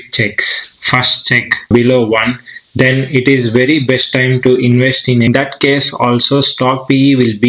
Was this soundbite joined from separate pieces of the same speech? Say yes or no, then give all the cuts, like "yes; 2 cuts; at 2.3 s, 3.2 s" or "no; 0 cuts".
yes; 2 cuts; at 1.7 s, 5.3 s